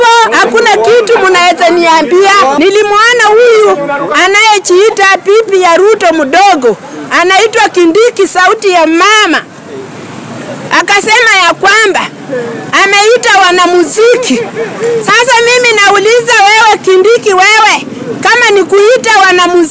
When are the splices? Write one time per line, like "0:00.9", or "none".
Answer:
0:02.5